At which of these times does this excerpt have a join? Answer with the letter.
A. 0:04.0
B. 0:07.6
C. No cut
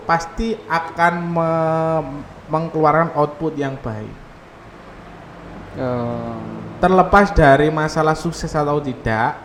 C